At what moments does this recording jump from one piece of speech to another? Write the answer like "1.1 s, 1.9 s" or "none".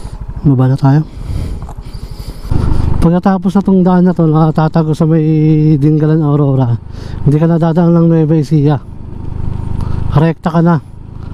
2.6 s